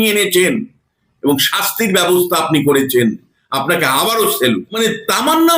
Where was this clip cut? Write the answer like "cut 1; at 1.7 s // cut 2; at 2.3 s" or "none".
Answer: none